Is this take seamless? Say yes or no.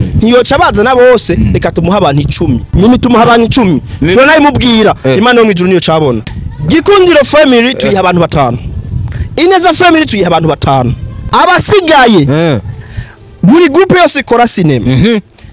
no